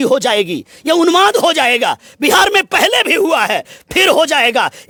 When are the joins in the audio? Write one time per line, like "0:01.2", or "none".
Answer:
none